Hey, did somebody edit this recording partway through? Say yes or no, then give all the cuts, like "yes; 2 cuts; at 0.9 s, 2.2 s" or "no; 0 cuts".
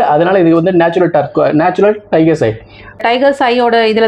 yes; 1 cut; at 3.2 s